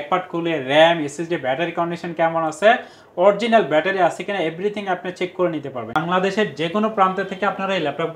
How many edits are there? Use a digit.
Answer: 1